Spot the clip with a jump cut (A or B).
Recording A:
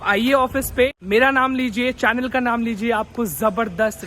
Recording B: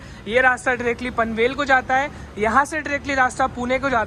A